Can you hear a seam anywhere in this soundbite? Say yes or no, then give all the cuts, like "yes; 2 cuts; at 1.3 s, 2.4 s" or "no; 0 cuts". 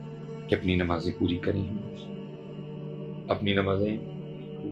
no; 0 cuts